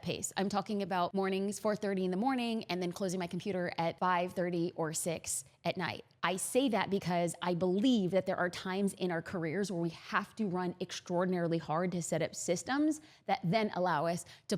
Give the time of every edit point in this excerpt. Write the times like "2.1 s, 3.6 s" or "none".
1.1 s, 4.0 s